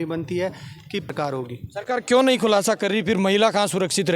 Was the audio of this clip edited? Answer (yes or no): yes